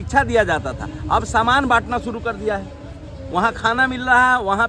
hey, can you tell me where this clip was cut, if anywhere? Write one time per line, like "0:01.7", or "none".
none